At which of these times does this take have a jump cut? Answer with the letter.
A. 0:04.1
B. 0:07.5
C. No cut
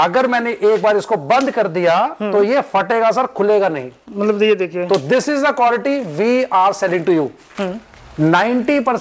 C